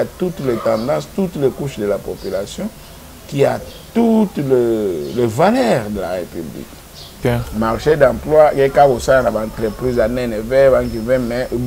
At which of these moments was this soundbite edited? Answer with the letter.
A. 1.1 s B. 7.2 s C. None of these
B